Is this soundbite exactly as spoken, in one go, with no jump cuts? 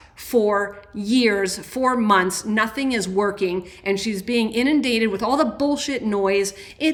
yes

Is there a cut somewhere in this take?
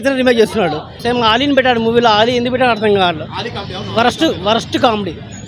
yes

